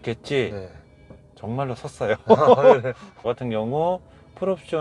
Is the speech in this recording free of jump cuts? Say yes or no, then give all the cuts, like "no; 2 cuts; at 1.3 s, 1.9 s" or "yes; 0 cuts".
no; 1 cut; at 3.2 s